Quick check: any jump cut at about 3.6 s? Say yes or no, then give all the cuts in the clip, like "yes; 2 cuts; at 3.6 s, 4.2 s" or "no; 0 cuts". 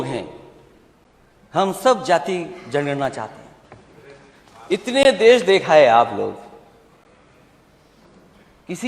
yes; 1 cut; at 3.6 s